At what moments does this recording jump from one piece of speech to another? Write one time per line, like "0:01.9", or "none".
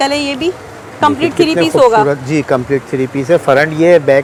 none